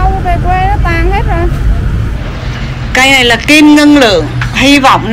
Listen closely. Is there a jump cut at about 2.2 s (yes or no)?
yes